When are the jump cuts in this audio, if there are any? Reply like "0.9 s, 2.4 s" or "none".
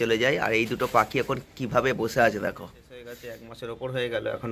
3.1 s